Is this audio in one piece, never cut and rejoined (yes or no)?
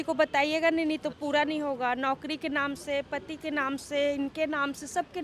yes